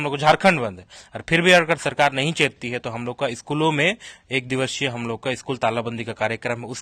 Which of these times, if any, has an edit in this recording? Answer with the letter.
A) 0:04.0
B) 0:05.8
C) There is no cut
C